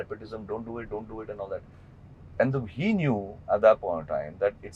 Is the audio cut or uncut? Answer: uncut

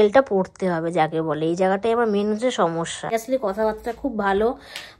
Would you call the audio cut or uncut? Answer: cut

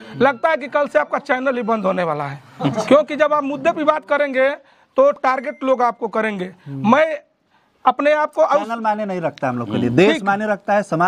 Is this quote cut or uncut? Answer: uncut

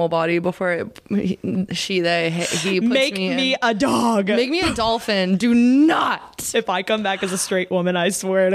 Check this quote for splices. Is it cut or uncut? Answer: uncut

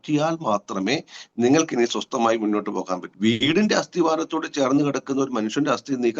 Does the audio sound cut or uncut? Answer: cut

